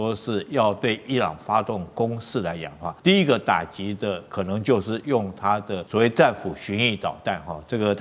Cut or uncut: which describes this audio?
cut